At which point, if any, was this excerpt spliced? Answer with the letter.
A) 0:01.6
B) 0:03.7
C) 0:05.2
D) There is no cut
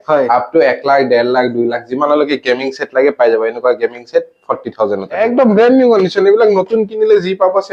C